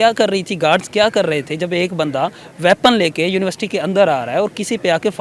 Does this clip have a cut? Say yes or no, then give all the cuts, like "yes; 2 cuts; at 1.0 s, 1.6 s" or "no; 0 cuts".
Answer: no; 0 cuts